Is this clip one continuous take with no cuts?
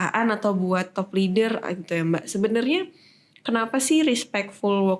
yes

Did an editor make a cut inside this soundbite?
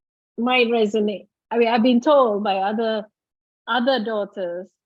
no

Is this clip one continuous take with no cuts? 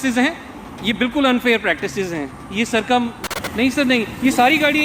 no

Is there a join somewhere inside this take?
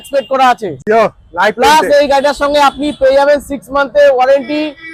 no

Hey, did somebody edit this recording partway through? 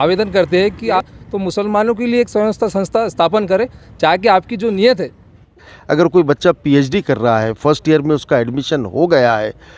yes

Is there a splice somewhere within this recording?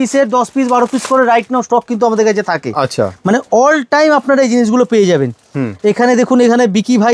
no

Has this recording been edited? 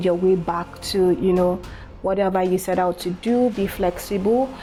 no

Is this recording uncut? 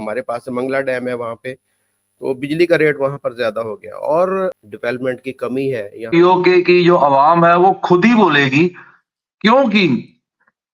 no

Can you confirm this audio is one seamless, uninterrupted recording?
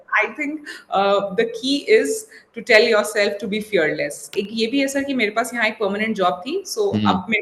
no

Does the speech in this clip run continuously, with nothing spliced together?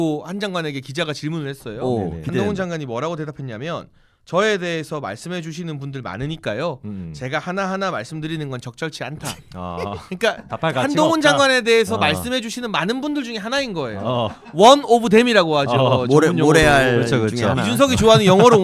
yes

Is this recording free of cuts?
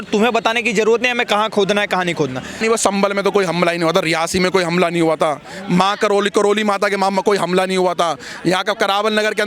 no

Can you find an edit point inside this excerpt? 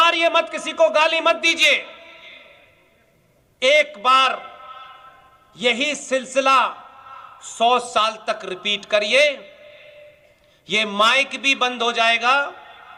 no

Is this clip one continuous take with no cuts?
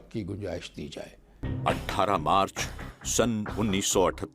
no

